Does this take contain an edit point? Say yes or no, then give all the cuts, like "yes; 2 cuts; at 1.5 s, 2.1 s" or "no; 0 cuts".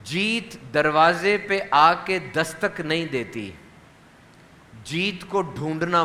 no; 0 cuts